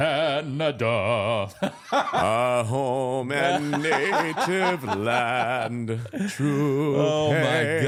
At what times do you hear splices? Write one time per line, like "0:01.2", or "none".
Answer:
none

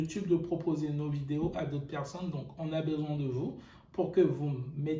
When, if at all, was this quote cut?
none

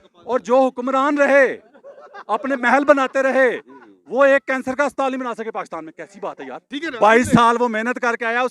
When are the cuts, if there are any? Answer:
0:06.7

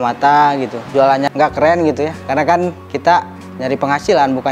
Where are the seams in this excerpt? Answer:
0:01.1
0:03.4

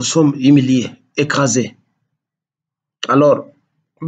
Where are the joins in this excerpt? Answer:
none

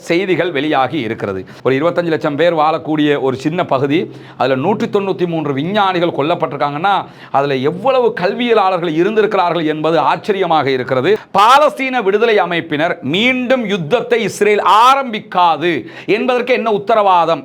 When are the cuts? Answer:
0:01.5
0:11.3

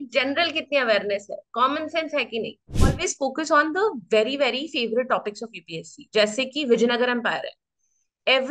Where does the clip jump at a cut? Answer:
0:02.8

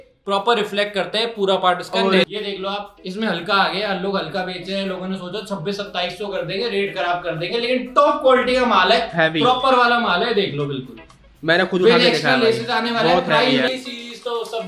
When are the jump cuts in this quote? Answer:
0:02.3
0:13.7

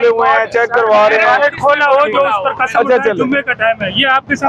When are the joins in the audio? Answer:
none

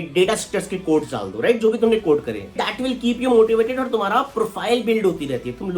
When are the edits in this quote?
0:02.5

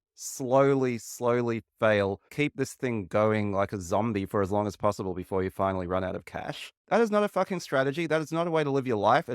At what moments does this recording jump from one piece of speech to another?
0:06.8

